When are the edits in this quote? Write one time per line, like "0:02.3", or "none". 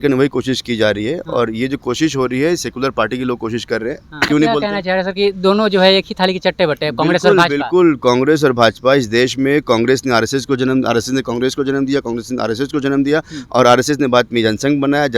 0:04.2